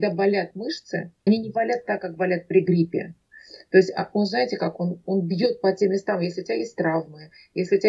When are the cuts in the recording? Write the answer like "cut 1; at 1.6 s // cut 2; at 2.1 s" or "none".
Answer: cut 1; at 1.3 s